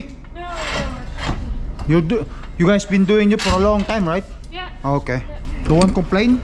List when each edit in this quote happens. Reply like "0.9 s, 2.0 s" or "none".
5.4 s

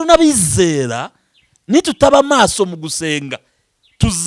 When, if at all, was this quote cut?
none

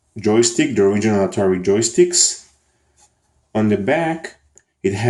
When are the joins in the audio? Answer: 2.0 s

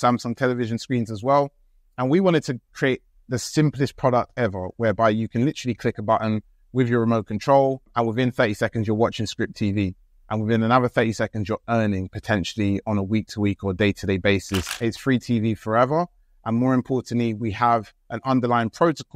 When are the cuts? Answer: 14.7 s

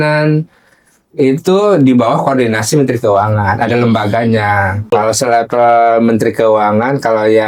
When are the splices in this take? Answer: 4.9 s

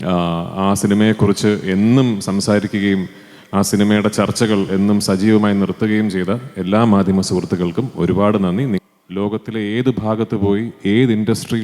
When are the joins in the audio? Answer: 8.8 s

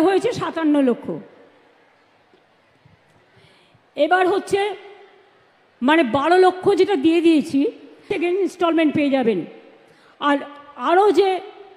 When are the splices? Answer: 8.1 s

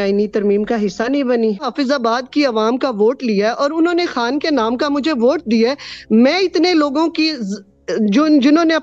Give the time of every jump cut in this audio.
1.6 s

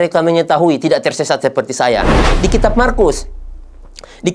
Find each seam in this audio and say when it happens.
2.2 s

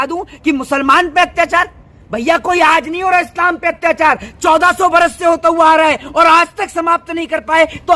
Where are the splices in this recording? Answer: none

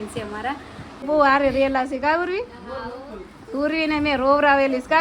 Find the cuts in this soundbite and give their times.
1.1 s

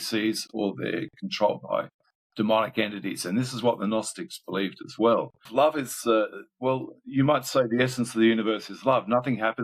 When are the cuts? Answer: 5.5 s

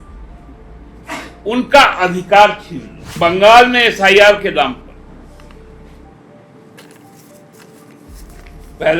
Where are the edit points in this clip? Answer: 3.1 s

